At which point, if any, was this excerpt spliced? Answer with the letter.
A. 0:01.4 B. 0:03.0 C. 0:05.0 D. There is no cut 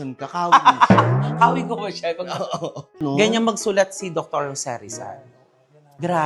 B